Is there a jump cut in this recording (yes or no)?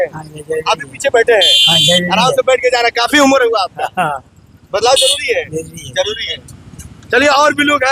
no